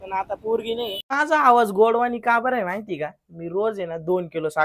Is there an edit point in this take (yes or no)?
yes